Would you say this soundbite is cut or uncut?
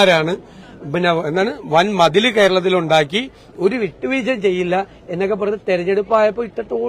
uncut